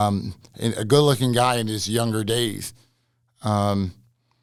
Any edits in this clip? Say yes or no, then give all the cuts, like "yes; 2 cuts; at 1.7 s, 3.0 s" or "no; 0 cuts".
no; 0 cuts